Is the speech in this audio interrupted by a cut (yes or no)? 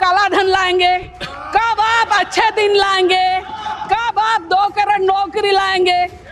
no